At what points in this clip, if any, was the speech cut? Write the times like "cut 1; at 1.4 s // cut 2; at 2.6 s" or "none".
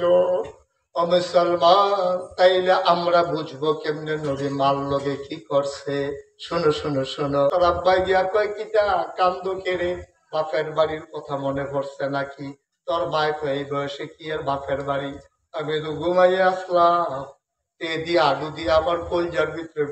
cut 1; at 7.5 s